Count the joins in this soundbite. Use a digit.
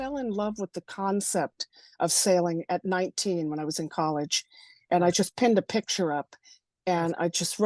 0